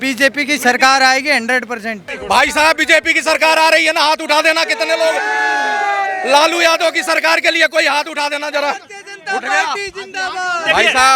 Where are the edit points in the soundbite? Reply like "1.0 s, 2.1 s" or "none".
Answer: 2.1 s